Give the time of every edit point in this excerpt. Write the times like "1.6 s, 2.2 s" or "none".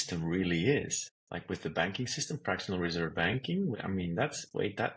1.6 s, 3.8 s